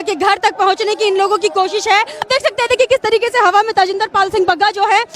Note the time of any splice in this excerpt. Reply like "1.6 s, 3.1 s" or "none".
2.2 s